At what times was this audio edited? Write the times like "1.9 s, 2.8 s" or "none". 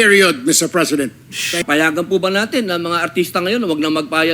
1.6 s

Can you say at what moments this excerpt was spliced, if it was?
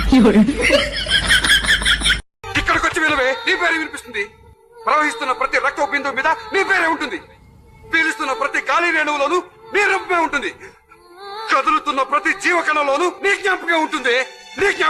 2.3 s

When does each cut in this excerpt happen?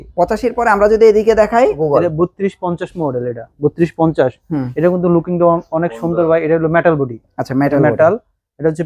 1.8 s

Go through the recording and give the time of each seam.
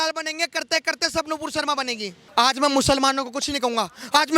2.2 s

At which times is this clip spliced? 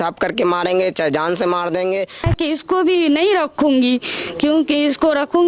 2.2 s

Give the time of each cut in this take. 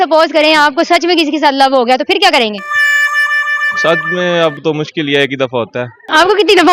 none

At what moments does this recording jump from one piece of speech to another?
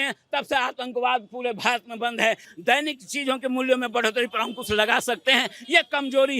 2.5 s

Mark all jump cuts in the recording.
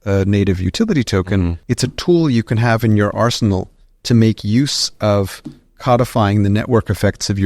1.6 s

